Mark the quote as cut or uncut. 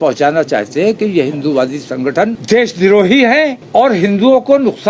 cut